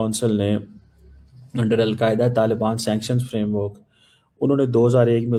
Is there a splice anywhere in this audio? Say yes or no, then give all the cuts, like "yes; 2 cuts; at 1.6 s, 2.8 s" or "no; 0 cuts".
no; 0 cuts